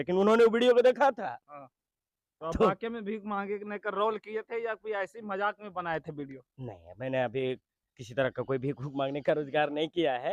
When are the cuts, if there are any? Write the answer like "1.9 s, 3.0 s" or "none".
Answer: none